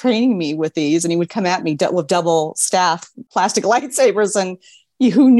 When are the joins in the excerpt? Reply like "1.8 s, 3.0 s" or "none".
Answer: none